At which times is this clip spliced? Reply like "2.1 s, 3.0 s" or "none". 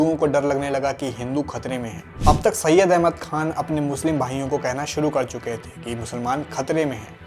2.0 s